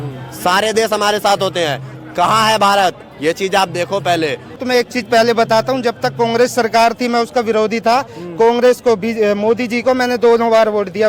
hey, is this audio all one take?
no; 1 cut; at 4.6 s

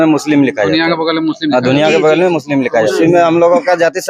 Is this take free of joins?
no; 1 cut; at 2.9 s

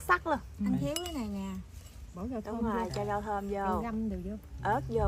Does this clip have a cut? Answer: no; 0 cuts

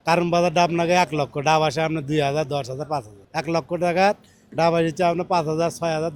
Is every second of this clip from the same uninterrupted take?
no; 1 cut; at 3.2 s

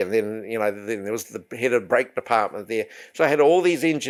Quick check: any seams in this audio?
no; 0 cuts

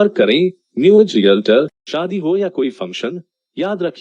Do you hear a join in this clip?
yes; 1 cut; at 1.8 s

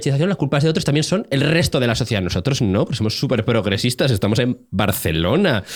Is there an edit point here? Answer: no; 0 cuts

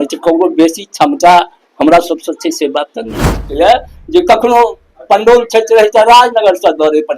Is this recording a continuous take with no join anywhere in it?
no; 1 cut; at 3.5 s

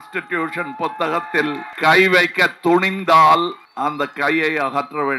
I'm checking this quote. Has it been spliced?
yes; 2 cuts; at 1.7 s, 3.6 s

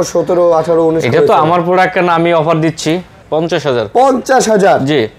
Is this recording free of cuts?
no; 1 cut; at 3.2 s

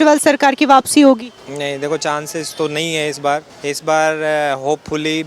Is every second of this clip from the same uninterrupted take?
no; 2 cuts; at 1.4 s, 3.5 s

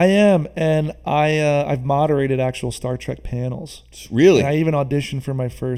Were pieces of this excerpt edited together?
no; 0 cuts

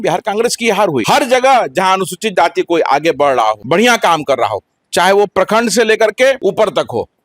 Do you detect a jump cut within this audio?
yes; 3 cuts; at 1.0 s, 3.6 s, 6.4 s

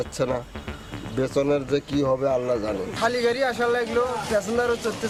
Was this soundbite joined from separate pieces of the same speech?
no; 0 cuts

